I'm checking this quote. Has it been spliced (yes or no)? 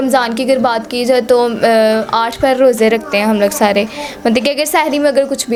no